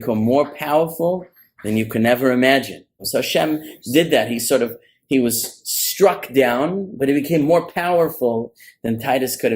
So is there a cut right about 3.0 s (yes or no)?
yes